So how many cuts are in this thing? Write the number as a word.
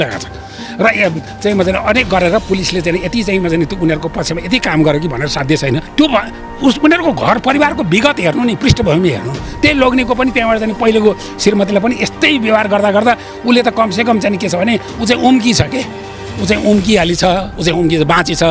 one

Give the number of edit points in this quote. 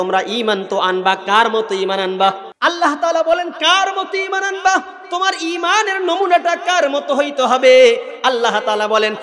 one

